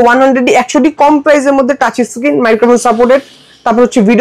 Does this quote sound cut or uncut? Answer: uncut